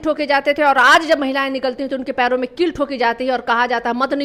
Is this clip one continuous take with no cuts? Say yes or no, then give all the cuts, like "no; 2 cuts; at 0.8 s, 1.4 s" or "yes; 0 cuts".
yes; 0 cuts